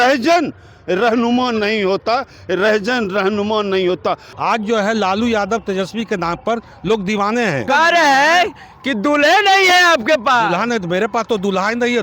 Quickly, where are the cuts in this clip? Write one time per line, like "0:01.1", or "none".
0:04.3
0:07.7